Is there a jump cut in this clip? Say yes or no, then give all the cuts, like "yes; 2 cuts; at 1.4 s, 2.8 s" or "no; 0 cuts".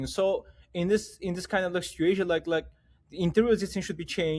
no; 0 cuts